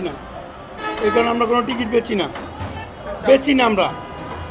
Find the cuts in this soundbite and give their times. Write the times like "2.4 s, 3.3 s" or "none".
none